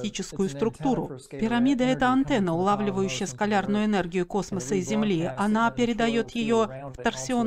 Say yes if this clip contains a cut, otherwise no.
yes